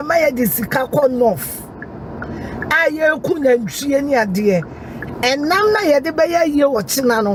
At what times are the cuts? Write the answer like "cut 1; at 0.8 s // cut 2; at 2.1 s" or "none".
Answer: none